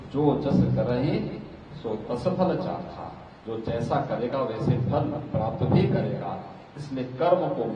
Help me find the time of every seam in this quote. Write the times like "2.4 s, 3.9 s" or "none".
none